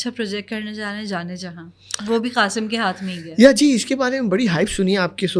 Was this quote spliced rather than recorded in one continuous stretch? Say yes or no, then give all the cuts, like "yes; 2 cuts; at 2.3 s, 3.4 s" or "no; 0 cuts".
no; 0 cuts